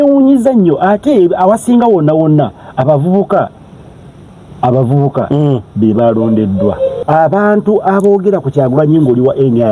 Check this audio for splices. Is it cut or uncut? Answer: cut